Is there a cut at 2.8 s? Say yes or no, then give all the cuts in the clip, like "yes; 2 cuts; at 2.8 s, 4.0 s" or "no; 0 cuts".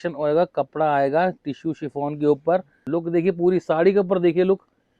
yes; 1 cut; at 2.8 s